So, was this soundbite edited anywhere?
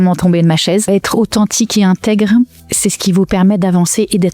yes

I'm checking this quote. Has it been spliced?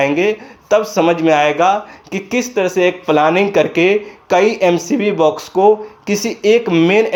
no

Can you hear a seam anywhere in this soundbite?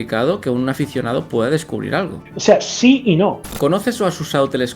yes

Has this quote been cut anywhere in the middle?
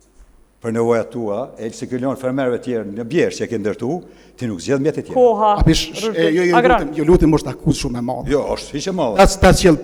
no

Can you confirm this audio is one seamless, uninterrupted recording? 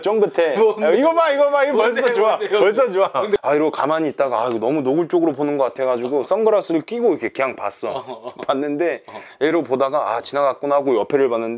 no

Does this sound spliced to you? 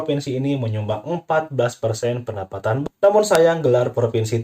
yes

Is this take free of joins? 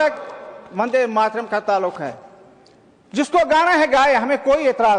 yes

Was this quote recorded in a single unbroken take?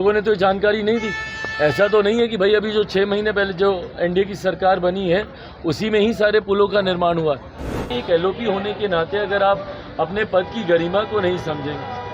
no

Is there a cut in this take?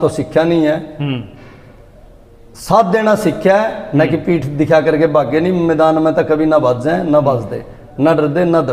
no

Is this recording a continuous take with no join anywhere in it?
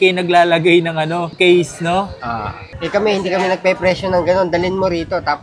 no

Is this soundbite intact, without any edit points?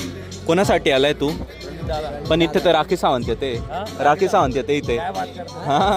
yes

